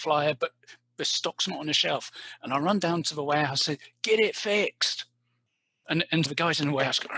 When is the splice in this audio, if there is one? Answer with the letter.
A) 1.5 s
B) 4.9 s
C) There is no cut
C